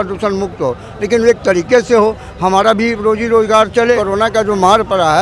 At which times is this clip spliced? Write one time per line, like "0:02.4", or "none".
0:04.0